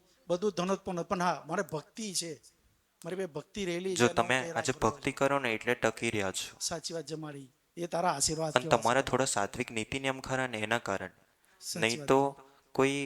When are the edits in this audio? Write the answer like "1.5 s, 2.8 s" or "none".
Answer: none